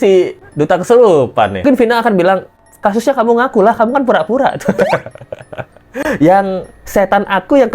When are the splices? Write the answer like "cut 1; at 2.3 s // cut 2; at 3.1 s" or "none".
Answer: cut 1; at 1.6 s